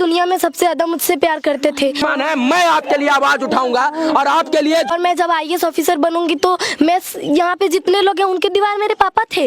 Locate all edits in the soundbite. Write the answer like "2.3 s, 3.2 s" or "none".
2.0 s, 4.9 s